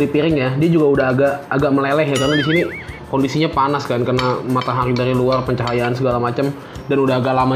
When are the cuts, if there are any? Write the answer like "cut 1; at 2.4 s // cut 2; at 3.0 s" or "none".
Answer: none